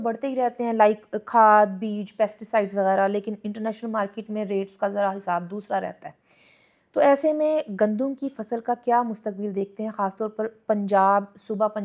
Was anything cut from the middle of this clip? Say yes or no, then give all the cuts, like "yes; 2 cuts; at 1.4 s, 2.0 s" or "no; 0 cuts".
no; 0 cuts